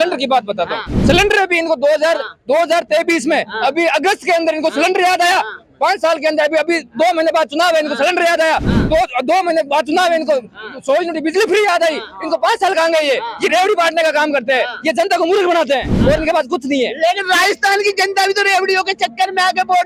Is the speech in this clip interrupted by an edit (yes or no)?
no